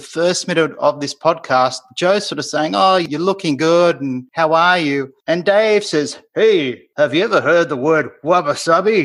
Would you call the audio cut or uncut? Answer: cut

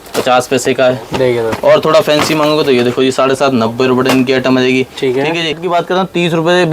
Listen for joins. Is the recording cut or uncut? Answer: cut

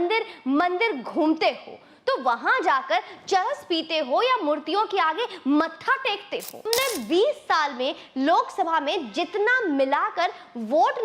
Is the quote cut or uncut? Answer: cut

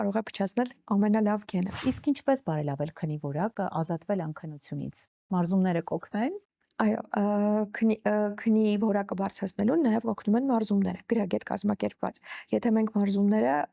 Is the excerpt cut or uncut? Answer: cut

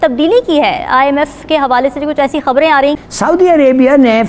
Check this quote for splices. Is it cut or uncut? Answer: cut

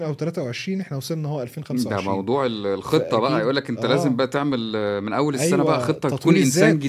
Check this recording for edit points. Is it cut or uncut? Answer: uncut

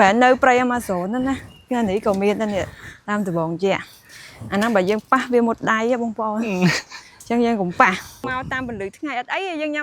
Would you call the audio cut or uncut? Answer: cut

